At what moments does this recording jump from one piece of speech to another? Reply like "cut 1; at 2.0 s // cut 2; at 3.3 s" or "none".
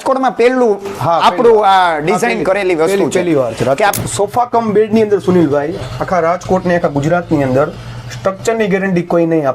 cut 1; at 4.0 s

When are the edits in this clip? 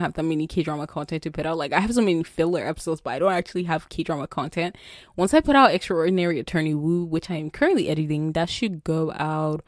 none

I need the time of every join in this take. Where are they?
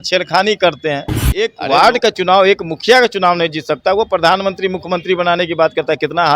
cut 1; at 1.6 s

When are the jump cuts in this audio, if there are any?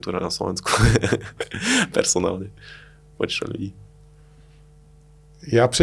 none

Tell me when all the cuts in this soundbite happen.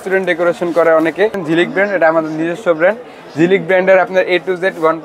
cut 1; at 1.4 s

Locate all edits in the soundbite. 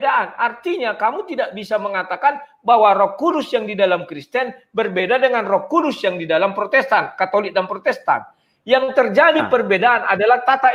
none

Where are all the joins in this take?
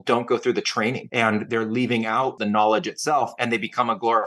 cut 1; at 1.0 s // cut 2; at 2.4 s // cut 3; at 3.4 s

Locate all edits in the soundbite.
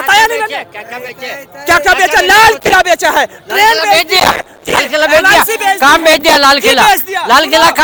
none

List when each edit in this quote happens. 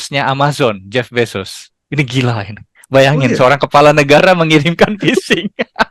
none

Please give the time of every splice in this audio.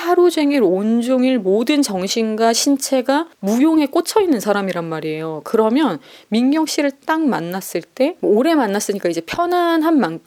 none

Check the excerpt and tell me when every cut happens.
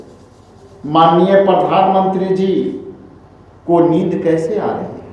none

